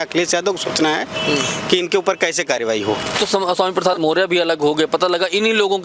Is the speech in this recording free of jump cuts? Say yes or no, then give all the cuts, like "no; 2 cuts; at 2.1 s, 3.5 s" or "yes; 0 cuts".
no; 1 cut; at 3.2 s